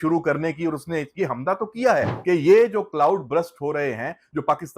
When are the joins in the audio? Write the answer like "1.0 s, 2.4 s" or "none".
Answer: 2.1 s